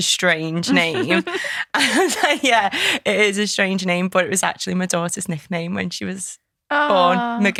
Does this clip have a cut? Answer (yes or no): no